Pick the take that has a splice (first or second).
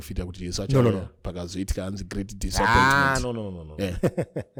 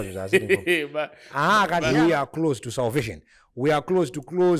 second